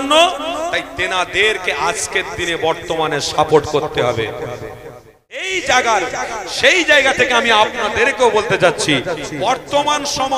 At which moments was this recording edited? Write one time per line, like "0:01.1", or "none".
0:05.5